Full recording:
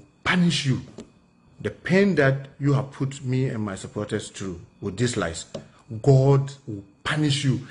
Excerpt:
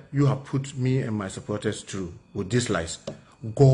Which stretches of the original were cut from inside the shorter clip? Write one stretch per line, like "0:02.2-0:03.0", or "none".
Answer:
none